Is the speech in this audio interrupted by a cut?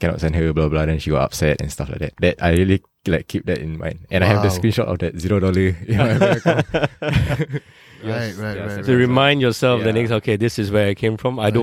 yes; 1 cut; at 2.1 s

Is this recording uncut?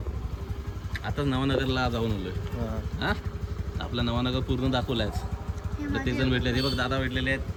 yes; 0 cuts

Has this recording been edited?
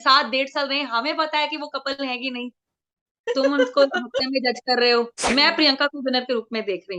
yes; 1 cut; at 5.2 s

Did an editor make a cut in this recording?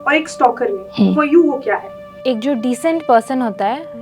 yes; 1 cut; at 2.1 s

